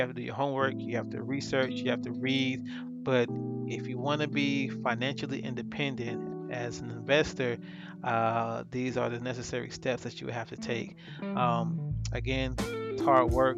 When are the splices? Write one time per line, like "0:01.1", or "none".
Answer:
none